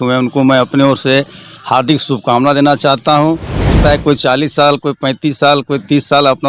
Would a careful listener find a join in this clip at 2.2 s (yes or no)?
no